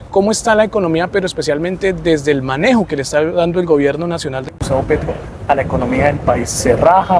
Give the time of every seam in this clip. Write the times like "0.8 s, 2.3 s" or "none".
none